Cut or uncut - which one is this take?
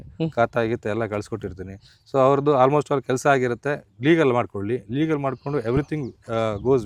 uncut